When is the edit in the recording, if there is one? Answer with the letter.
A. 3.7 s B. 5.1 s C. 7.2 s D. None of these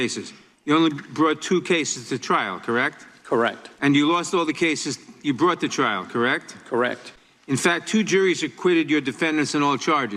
A